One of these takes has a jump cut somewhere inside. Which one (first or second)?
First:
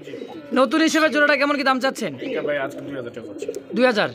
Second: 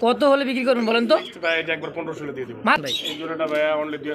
second